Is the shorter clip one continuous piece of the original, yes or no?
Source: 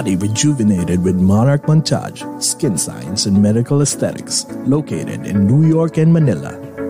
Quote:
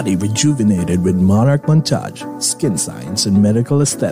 yes